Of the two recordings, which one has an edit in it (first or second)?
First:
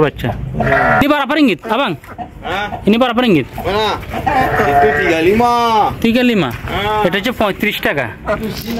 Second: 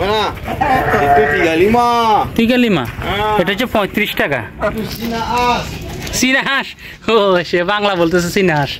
first